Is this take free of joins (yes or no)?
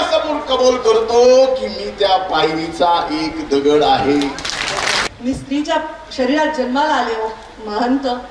no